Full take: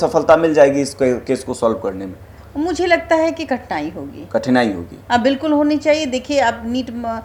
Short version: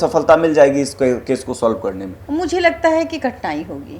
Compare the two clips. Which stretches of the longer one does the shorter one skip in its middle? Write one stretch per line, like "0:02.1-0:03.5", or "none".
0:02.1-0:02.4